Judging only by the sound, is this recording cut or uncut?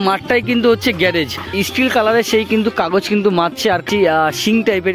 cut